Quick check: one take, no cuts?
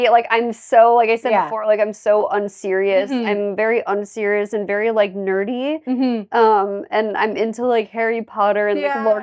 yes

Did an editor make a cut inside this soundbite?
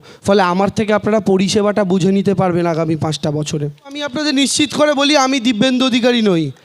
yes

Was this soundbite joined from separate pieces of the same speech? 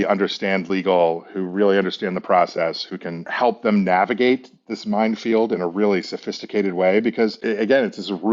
yes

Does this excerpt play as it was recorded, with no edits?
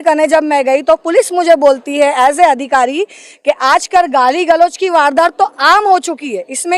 yes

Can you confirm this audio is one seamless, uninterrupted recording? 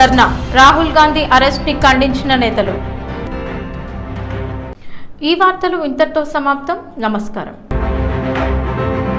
yes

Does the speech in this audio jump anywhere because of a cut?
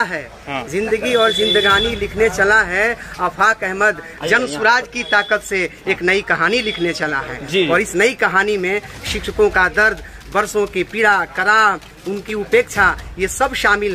no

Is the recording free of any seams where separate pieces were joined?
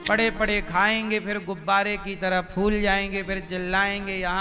yes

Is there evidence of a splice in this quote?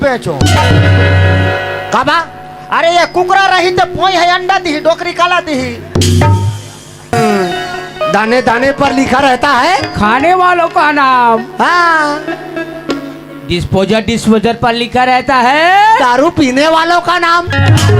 yes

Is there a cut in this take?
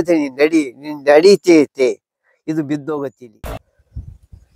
yes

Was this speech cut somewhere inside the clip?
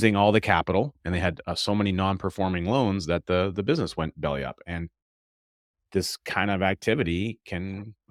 no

